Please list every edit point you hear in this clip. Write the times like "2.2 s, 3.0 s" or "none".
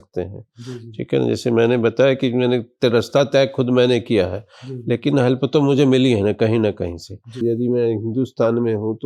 7.4 s